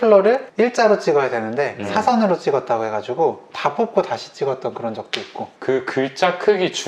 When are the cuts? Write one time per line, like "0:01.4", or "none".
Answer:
0:05.5